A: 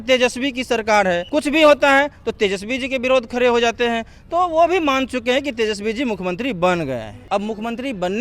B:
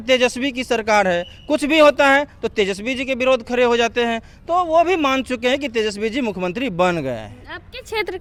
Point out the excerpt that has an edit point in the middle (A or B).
A